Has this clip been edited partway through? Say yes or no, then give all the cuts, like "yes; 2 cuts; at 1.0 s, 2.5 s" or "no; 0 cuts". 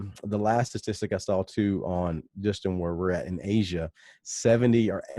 no; 0 cuts